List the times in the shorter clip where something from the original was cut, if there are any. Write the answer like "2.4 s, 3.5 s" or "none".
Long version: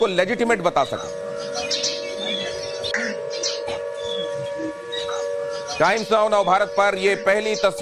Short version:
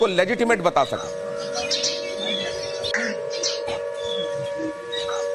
none